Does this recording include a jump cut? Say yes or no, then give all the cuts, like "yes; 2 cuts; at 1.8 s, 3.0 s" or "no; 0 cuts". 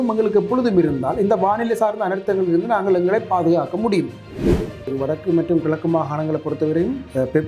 yes; 1 cut; at 4.5 s